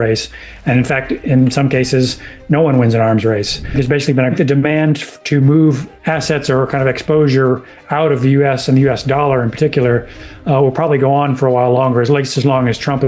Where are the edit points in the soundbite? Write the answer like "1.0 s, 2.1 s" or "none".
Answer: 3.9 s, 5.9 s